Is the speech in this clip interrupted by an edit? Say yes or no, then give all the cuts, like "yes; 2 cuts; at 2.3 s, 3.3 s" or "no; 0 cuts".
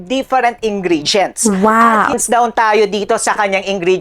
yes; 1 cut; at 2.2 s